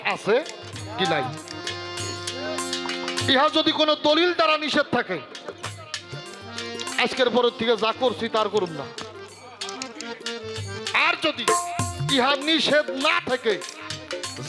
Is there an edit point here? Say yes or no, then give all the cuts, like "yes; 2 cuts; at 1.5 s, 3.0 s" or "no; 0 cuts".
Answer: no; 0 cuts